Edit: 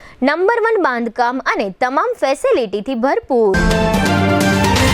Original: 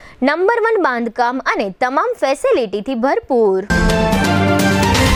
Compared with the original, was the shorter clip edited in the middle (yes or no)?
yes